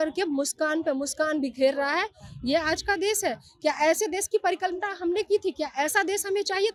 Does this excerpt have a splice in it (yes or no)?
no